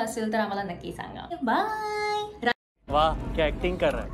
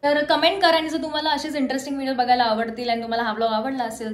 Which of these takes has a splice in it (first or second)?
first